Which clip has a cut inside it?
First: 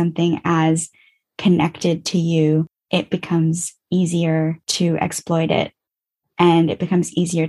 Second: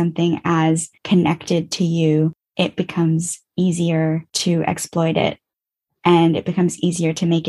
second; 1 cut; at 0.9 s

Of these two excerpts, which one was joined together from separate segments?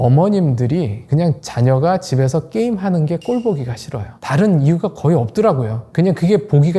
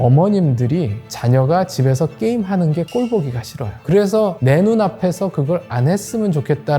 second; 2 cuts; at 1.1 s, 3.8 s

